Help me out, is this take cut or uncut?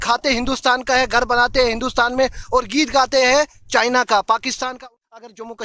cut